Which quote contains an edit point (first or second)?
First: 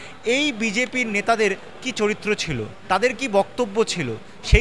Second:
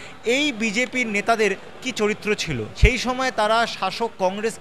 second